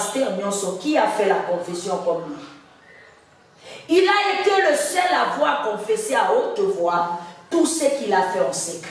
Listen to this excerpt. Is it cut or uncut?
uncut